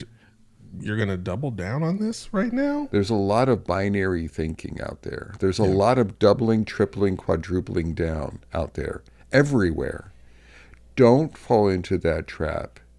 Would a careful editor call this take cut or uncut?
cut